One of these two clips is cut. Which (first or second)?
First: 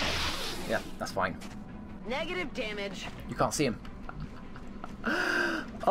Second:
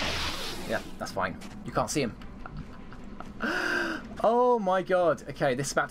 second